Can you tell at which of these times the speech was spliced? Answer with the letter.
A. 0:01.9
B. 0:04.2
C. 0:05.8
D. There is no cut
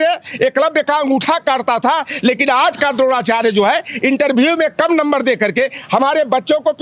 D